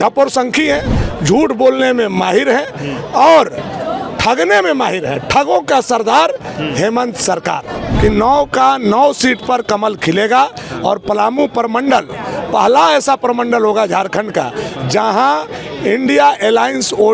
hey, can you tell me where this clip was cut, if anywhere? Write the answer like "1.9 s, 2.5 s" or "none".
7.9 s